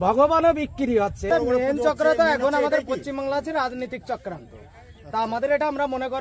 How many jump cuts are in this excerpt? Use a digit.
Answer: 1